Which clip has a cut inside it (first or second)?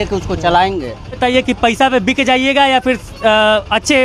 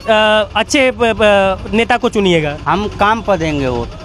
first